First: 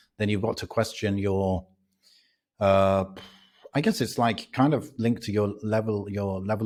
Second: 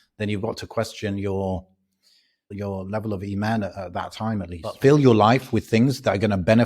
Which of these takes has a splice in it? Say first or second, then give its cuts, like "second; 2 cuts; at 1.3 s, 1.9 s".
second; 2 cuts; at 2.5 s, 4.8 s